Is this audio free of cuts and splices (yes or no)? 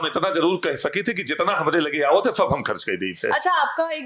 yes